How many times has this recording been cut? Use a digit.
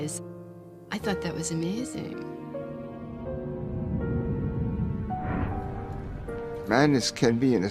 1